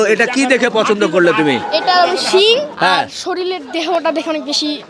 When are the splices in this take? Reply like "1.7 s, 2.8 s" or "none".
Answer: none